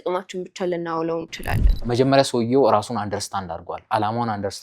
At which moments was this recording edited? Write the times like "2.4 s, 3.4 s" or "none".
1.8 s